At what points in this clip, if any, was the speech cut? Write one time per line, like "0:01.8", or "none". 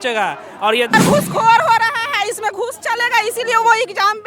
0:00.9

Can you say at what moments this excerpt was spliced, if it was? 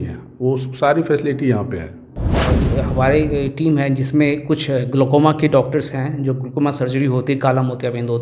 0:02.5

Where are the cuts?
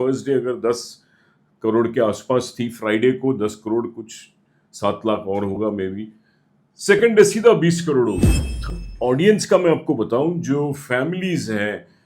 0:08.7

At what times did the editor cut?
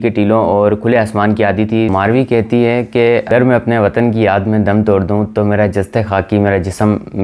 0:01.9

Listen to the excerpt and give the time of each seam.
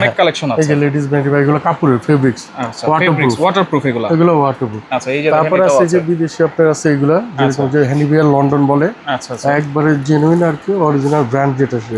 none

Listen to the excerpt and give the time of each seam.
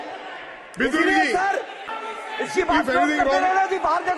0:02.1

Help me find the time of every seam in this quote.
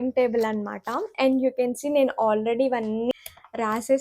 0:03.1

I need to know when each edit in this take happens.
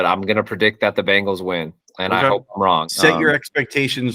0:02.9

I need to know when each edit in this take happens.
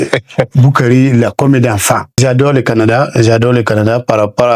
0:02.2

